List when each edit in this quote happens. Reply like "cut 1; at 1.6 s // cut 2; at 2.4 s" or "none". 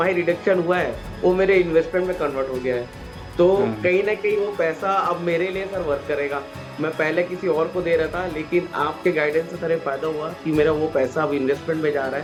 none